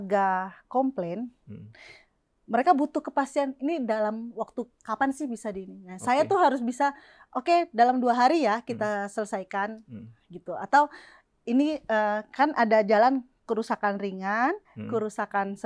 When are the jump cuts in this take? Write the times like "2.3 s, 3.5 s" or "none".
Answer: none